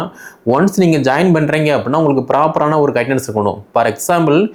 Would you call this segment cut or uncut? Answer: uncut